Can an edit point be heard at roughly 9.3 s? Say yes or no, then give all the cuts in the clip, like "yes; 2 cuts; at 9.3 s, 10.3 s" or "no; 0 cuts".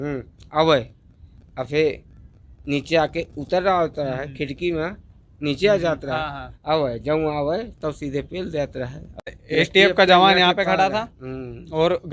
yes; 1 cut; at 9.3 s